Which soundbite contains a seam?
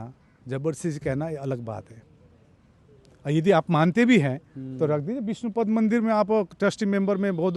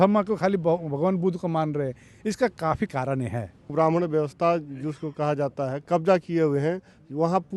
second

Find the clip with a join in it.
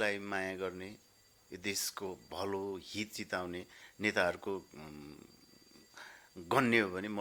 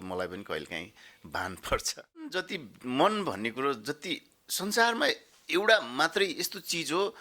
second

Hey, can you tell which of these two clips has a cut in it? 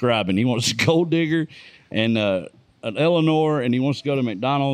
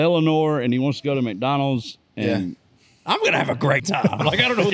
second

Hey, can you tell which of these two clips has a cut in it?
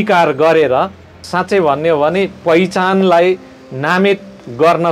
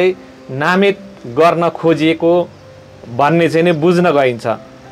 first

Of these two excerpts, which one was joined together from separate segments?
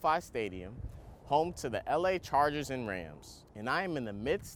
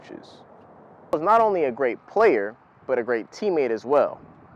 second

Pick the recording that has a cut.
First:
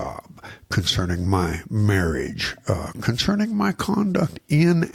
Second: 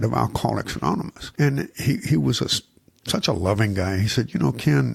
second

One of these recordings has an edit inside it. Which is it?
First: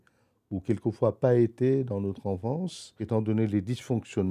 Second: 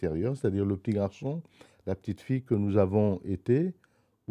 first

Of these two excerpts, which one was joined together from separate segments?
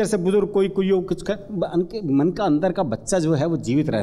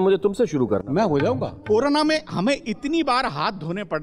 second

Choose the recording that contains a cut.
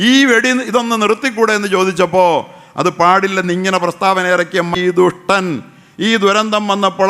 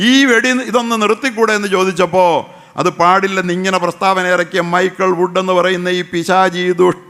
first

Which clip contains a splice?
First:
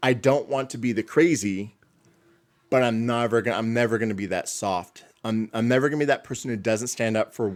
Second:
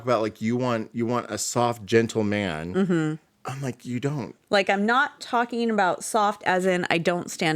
second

